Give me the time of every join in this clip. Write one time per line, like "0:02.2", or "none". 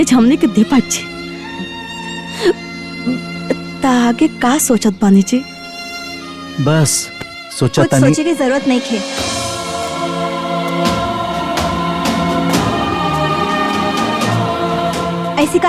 none